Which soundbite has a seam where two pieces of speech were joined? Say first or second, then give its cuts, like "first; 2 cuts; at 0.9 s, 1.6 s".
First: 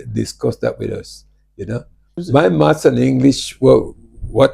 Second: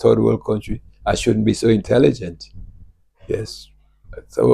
first; 1 cut; at 2.1 s